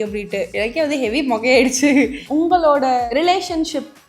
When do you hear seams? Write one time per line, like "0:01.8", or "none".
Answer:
0:02.2
0:03.0